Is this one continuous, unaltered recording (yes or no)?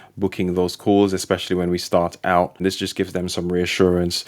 no